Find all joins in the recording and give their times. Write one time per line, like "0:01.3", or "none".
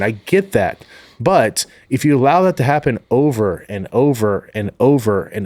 none